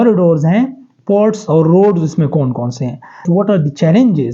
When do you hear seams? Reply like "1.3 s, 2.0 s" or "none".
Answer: 3.2 s